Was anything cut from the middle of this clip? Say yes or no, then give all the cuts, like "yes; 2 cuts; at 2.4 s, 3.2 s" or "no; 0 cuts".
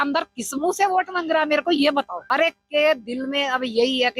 yes; 1 cut; at 2.2 s